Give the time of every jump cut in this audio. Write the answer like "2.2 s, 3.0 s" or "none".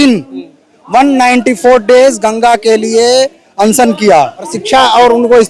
4.6 s